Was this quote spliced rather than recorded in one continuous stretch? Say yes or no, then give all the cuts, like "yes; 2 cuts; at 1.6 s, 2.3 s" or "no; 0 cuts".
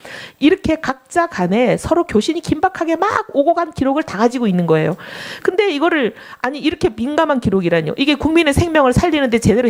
no; 0 cuts